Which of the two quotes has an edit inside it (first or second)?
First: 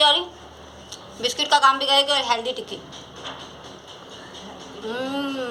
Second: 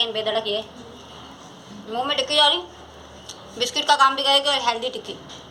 second